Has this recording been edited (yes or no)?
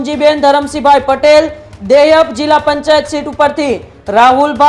no